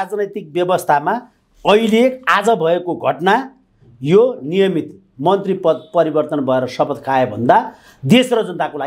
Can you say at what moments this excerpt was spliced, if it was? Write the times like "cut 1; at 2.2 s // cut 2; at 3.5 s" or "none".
none